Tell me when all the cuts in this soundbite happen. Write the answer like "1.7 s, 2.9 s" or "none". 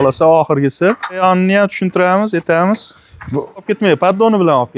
1.2 s, 3.6 s

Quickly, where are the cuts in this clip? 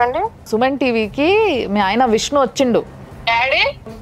3.1 s

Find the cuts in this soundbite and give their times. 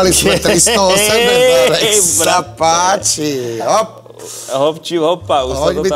none

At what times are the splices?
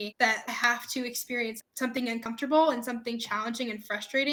none

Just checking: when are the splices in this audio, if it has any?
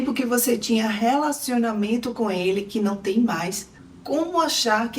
3.7 s

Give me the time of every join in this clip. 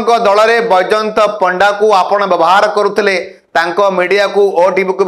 none

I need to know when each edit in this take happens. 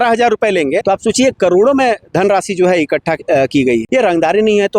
3.9 s

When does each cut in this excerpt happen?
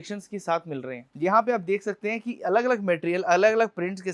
1.0 s

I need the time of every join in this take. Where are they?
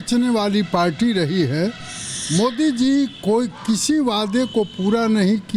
none

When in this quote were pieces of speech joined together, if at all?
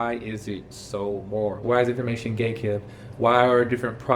1.6 s

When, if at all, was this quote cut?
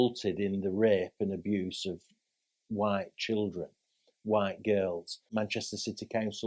5.3 s

